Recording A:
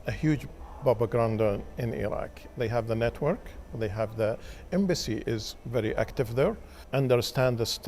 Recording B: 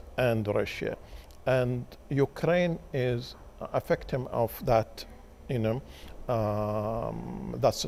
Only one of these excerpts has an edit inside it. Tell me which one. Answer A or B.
A